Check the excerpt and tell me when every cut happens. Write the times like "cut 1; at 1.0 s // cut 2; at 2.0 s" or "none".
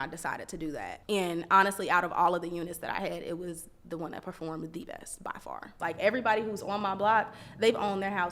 cut 1; at 1.0 s // cut 2; at 5.7 s